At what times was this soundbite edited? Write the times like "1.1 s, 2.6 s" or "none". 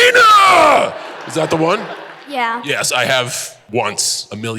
3.6 s